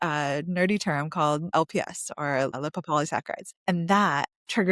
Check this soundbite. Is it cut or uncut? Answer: cut